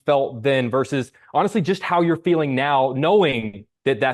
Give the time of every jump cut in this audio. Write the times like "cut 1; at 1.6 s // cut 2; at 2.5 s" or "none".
none